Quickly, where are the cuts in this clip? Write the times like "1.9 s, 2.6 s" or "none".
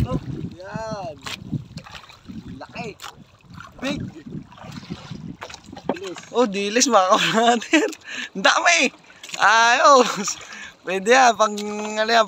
6.0 s